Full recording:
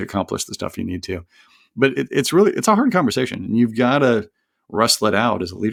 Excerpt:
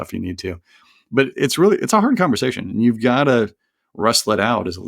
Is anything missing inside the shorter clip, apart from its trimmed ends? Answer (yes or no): yes